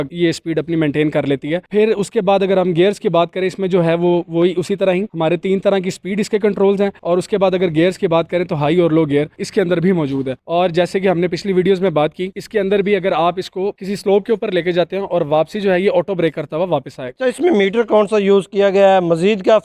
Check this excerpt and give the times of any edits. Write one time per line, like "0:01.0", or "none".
none